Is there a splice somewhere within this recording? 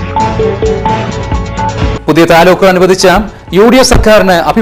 no; 0 cuts

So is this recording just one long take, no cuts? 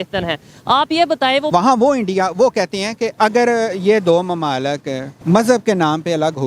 no; 3 cuts; at 1.5 s, 3.1 s, 5.1 s

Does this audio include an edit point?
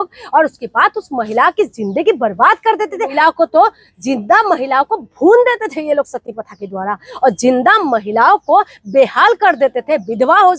yes; 1 cut; at 3.1 s

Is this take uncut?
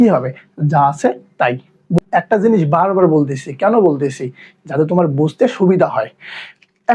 no; 1 cut; at 2.0 s

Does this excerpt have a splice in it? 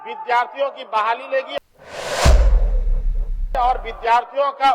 yes; 2 cuts; at 1.5 s, 3.5 s

